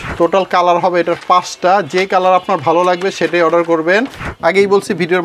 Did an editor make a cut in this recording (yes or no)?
yes